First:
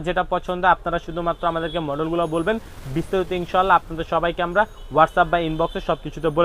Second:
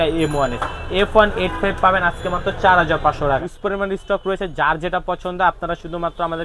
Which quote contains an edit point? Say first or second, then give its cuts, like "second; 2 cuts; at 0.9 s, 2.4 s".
second; 1 cut; at 3.5 s